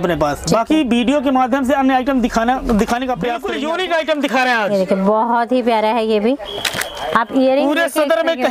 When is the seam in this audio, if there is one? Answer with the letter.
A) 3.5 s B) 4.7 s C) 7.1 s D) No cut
A